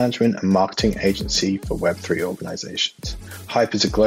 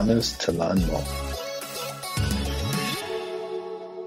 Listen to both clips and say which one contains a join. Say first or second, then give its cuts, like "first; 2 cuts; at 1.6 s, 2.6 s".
second; 1 cut; at 1.0 s